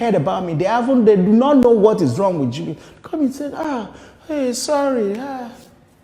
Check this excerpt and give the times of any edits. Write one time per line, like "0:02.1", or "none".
none